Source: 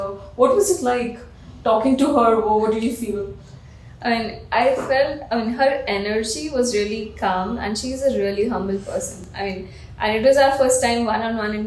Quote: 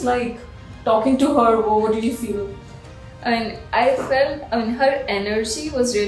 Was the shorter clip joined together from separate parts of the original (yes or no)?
no